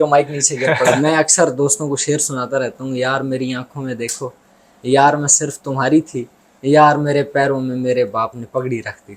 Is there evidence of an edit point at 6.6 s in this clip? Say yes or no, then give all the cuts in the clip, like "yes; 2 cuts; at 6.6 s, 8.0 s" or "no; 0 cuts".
no; 1 cut; at 1.0 s